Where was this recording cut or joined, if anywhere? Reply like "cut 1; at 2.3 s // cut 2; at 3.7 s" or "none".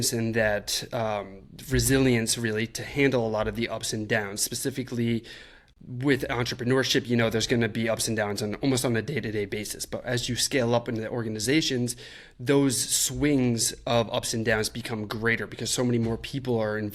none